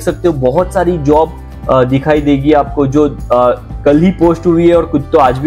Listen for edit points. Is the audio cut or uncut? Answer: uncut